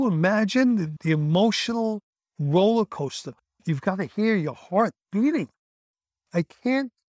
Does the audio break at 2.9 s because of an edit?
no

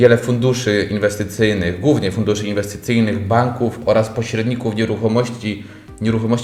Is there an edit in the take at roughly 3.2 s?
no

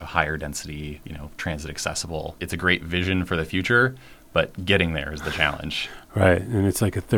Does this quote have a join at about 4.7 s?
no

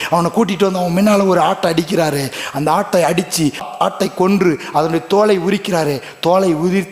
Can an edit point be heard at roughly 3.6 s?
yes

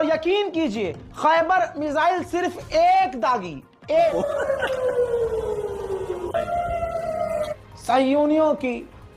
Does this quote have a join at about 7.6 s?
yes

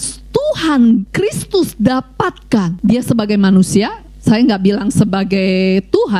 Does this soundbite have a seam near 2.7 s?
yes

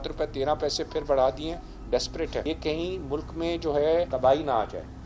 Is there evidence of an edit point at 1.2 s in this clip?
no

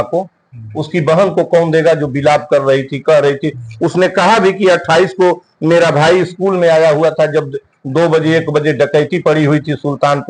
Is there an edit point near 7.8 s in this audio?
no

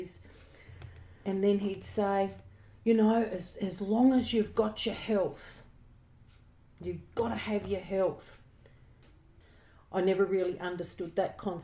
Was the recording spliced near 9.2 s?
yes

